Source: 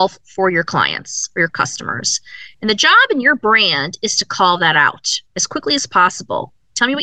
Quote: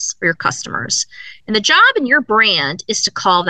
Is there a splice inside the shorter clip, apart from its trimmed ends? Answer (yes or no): no